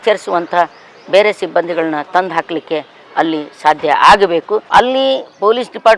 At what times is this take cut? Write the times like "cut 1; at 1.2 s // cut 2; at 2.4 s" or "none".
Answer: cut 1; at 4.6 s